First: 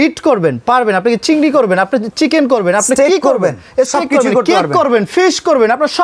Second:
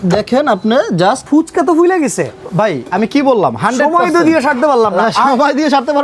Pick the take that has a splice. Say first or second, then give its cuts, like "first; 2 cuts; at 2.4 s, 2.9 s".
second; 1 cut; at 1.2 s